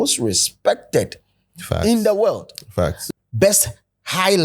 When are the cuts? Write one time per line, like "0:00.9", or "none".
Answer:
0:03.0